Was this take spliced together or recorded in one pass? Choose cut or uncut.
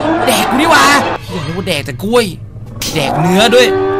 cut